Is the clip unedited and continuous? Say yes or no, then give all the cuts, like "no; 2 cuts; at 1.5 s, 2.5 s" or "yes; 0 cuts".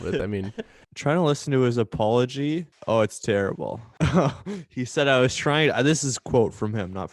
no; 2 cuts; at 0.8 s, 2.7 s